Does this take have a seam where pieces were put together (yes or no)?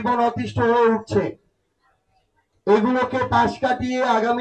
no